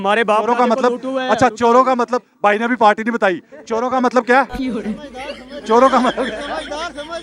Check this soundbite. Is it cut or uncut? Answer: uncut